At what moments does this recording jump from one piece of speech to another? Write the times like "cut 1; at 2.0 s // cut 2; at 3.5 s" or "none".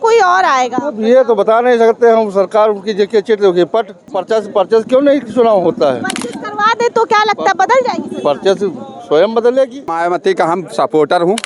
cut 1; at 4.2 s // cut 2; at 9.9 s